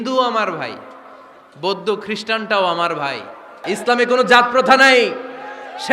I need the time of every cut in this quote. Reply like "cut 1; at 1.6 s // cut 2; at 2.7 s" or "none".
cut 1; at 3.6 s